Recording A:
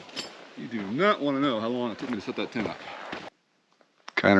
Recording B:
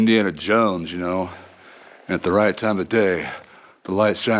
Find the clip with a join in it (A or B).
A